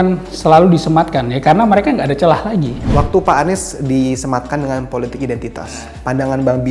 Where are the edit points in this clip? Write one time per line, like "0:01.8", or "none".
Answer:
0:02.8

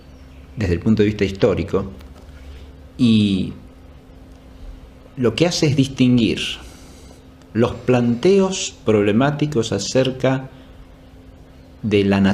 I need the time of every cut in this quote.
none

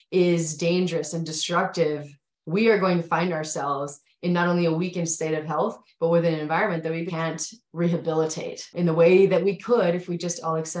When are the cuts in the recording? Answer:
0:07.1
0:08.7

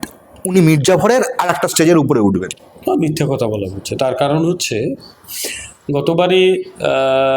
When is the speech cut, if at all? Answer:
none

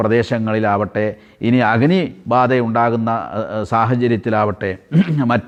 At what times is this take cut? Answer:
none

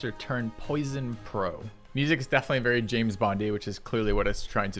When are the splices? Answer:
0:01.7

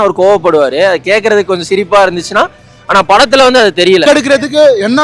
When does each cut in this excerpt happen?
0:04.0

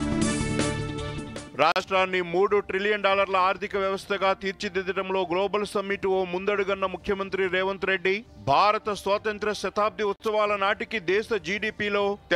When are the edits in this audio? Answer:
none

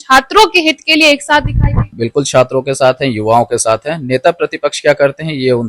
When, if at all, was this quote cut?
0:01.9

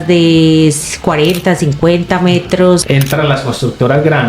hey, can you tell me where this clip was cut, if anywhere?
0:02.8

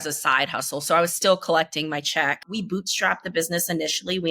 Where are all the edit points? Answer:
0:02.5

